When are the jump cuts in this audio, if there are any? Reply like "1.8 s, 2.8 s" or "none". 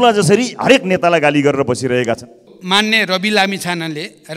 2.5 s